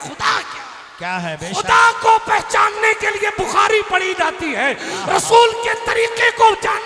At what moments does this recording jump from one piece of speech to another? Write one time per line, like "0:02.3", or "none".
none